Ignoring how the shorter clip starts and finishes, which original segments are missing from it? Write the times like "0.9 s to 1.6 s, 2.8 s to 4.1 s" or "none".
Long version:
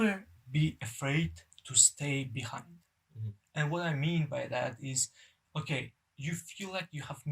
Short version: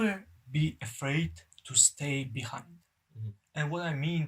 none